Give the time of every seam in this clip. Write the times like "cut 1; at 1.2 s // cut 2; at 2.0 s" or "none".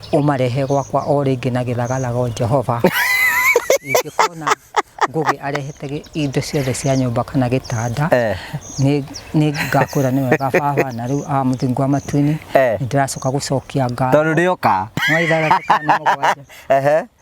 cut 1; at 15.1 s